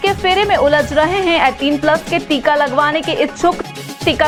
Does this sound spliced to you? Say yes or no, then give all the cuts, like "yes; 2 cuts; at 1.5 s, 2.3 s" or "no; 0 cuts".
no; 0 cuts